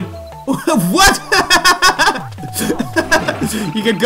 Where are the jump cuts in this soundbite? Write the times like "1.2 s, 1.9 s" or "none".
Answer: none